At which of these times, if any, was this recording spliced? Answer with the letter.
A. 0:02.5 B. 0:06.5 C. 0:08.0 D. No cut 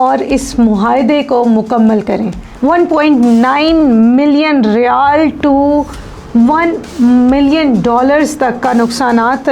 A